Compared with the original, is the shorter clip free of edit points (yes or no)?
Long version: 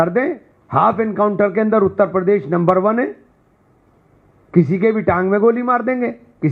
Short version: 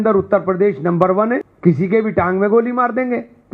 no